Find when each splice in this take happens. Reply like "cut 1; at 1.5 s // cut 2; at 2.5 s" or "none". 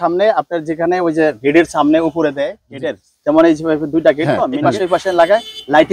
cut 1; at 2.6 s // cut 2; at 4.5 s